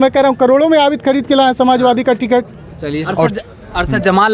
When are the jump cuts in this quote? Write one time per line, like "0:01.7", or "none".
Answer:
0:03.1